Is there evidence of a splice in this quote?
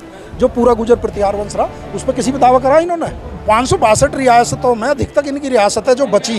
yes; 1 cut; at 3.4 s

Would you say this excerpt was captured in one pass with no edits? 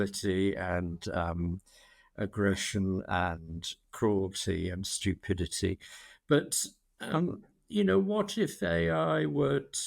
yes; 0 cuts

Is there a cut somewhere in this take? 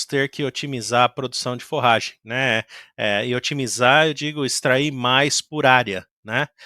no; 0 cuts

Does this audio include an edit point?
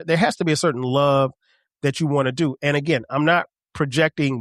no; 0 cuts

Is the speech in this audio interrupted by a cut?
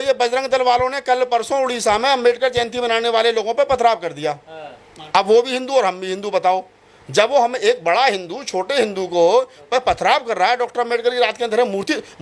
no; 0 cuts

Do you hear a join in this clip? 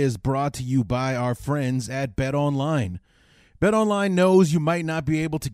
no; 0 cuts

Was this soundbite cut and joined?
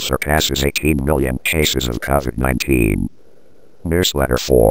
yes; 1 cut; at 3.8 s

